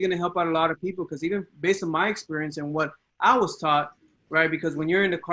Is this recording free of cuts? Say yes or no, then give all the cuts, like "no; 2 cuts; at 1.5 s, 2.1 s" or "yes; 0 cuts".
yes; 0 cuts